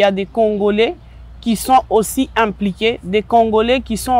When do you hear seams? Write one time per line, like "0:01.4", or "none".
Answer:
none